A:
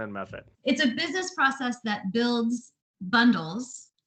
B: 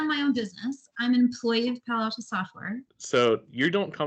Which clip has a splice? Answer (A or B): B